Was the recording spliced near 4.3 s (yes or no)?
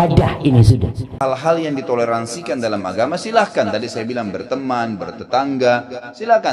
no